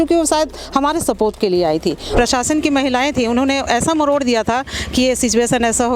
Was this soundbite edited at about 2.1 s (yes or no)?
yes